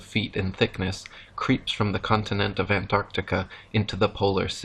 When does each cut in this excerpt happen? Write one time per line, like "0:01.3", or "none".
none